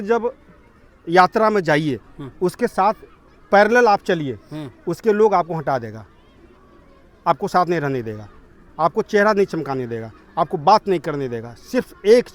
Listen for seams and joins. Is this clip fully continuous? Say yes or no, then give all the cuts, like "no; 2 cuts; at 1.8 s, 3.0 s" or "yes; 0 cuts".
yes; 0 cuts